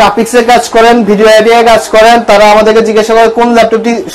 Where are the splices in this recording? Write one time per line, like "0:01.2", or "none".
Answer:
none